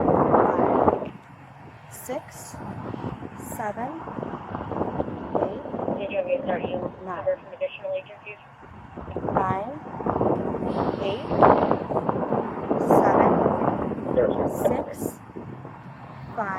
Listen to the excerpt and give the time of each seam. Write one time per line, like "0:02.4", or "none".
none